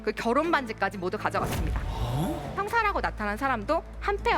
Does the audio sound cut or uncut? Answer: cut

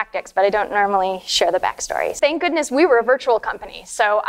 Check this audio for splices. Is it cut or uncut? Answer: cut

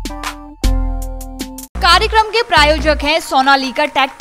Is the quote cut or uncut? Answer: cut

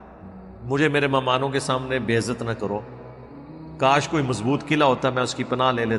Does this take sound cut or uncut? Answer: uncut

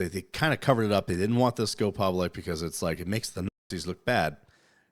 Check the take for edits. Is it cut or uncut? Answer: uncut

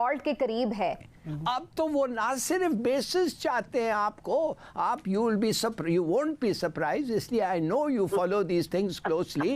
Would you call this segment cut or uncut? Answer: cut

